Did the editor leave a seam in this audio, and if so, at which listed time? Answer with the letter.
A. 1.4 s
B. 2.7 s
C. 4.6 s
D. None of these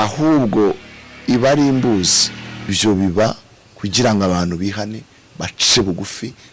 B